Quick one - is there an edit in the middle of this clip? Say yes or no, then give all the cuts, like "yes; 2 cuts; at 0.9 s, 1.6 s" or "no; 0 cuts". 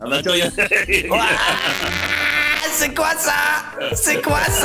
yes; 1 cut; at 3.7 s